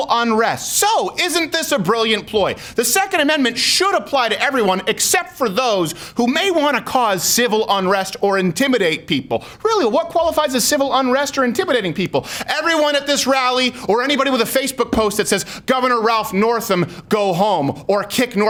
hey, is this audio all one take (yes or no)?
yes